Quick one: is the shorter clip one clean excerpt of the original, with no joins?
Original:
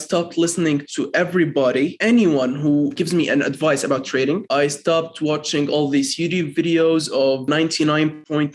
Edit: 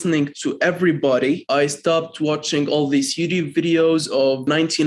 no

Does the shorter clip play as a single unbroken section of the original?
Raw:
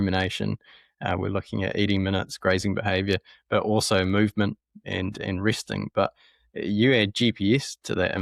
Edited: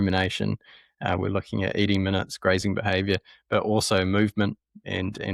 yes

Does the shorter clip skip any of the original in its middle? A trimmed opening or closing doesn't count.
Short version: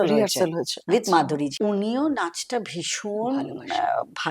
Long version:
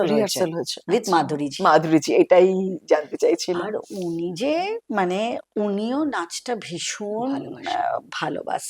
yes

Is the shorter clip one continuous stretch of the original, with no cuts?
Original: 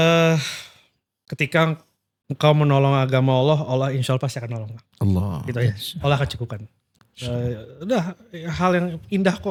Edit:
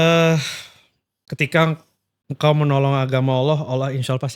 yes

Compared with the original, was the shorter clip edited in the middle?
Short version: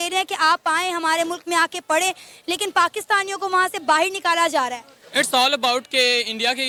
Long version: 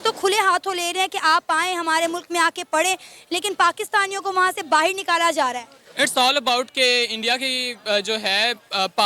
no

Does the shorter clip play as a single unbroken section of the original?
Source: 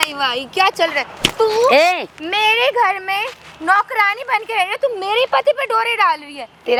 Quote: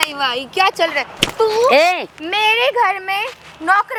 yes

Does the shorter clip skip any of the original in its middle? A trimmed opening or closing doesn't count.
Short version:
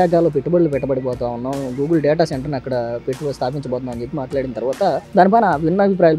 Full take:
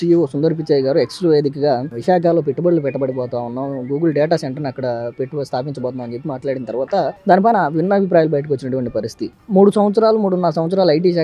no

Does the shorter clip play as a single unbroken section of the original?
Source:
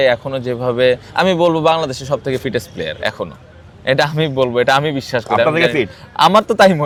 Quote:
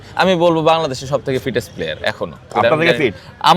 no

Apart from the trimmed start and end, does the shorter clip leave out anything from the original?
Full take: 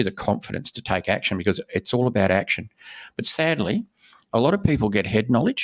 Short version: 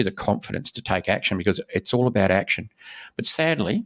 no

